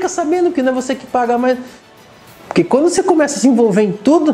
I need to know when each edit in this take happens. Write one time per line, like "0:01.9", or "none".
0:02.1